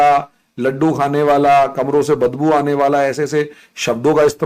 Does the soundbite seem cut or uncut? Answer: uncut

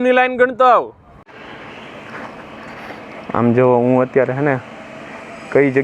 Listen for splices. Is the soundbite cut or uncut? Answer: cut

